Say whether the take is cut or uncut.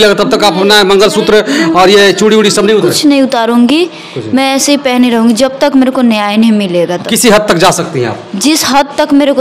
uncut